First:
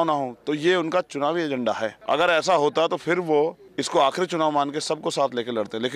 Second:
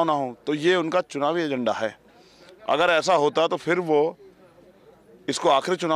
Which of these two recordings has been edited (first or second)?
first